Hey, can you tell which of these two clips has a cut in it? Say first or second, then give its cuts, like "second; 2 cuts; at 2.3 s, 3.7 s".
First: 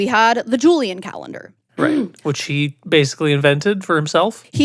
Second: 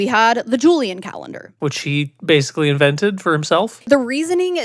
second; 2 cuts; at 1.5 s, 3.9 s